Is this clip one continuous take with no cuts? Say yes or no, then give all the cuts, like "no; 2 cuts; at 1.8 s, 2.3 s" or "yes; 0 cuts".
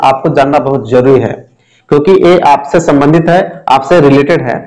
yes; 0 cuts